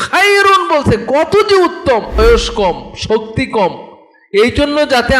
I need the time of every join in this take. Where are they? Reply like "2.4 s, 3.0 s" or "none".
2.2 s